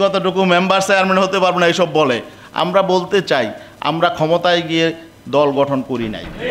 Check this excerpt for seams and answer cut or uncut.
uncut